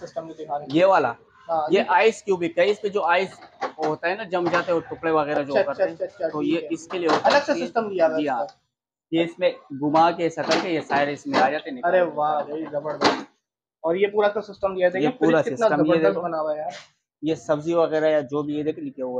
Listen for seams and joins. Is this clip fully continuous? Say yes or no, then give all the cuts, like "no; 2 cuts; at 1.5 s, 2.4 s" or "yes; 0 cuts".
yes; 0 cuts